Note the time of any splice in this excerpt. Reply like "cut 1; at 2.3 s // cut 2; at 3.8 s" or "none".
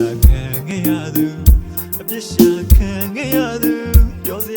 cut 1; at 1.5 s